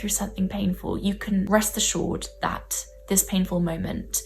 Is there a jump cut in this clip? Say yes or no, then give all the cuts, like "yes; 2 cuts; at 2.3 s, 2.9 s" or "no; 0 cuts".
yes; 1 cut; at 1.5 s